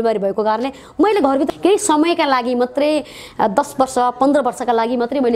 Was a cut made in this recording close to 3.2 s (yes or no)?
no